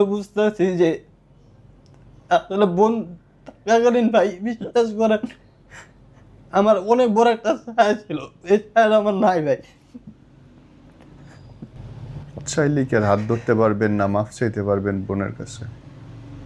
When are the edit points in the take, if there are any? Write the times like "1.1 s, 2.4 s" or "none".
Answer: none